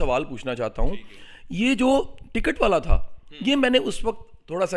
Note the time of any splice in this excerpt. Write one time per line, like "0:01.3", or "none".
none

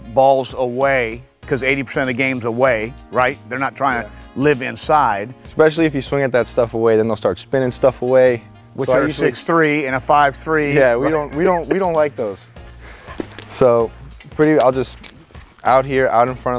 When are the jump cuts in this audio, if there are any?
none

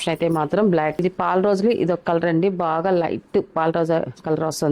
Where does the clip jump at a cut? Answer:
0:01.0

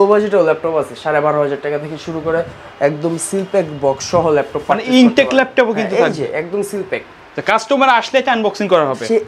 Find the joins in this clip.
none

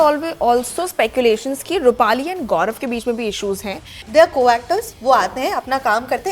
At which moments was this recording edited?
0:04.0

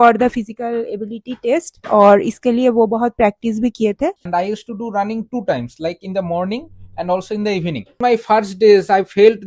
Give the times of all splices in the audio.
0:04.3
0:08.0

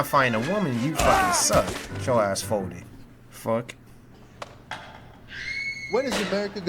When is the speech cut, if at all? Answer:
0:03.9

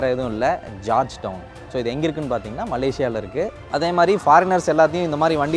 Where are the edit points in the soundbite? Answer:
0:03.7

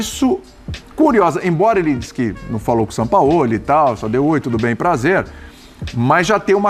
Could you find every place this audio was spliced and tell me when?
none

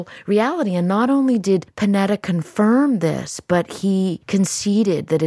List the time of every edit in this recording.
0:01.7
0:04.2

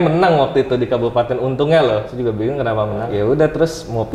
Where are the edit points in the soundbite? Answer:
0:02.1
0:03.1

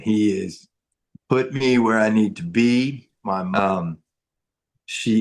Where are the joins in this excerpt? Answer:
0:03.5

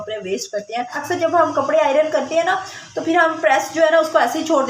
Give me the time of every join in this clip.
0:01.0

